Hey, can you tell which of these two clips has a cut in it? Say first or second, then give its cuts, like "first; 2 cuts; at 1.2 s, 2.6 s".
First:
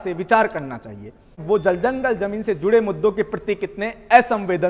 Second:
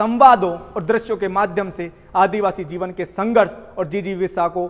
first; 1 cut; at 1.4 s